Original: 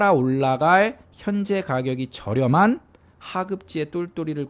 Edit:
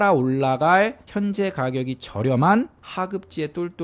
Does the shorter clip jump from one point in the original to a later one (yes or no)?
yes